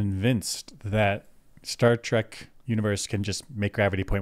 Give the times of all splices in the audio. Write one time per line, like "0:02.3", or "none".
none